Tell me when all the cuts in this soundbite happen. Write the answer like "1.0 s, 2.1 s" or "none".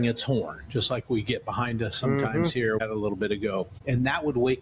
2.8 s, 3.8 s